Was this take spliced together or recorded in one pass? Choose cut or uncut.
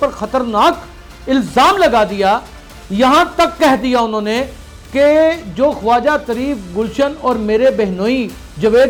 uncut